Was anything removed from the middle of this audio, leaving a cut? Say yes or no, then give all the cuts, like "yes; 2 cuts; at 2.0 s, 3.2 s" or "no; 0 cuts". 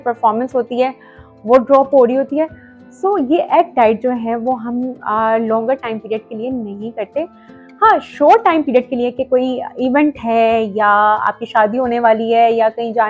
no; 0 cuts